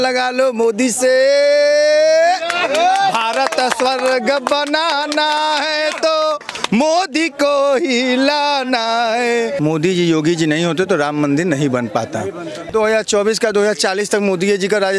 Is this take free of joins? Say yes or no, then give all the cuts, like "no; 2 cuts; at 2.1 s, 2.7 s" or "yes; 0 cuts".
no; 2 cuts; at 9.5 s, 12.6 s